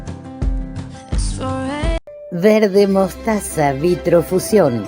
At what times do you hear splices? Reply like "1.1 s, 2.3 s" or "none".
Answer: 2.1 s